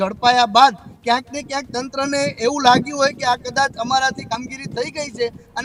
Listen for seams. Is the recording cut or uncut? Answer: uncut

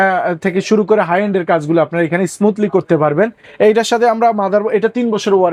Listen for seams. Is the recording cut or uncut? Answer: uncut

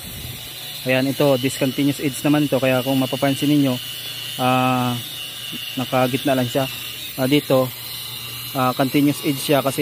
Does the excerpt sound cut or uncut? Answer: uncut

